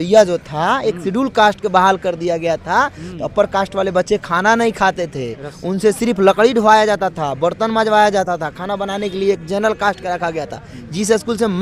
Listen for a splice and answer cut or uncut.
uncut